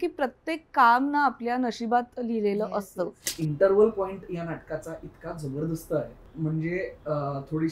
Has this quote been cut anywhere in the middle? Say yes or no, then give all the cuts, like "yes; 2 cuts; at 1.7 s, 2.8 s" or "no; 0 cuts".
yes; 1 cut; at 3.3 s